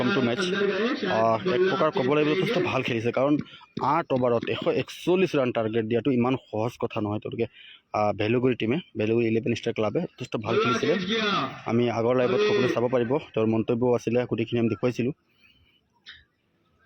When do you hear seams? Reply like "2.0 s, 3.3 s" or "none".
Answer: 13.3 s